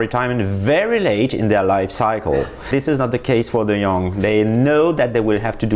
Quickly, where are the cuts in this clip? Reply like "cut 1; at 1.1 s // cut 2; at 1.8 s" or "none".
none